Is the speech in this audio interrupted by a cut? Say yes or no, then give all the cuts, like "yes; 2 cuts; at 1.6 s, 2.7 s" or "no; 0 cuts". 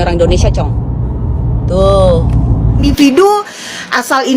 yes; 1 cut; at 2.8 s